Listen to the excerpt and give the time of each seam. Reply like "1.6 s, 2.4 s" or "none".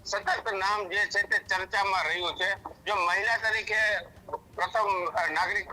none